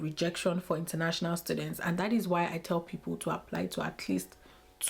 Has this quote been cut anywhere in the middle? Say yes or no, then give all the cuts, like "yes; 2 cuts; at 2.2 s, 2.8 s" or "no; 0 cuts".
no; 0 cuts